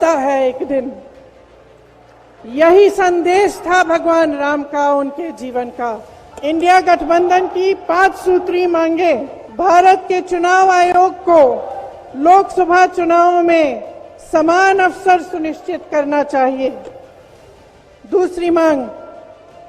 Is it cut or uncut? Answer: cut